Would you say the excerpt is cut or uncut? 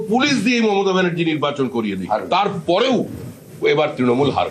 uncut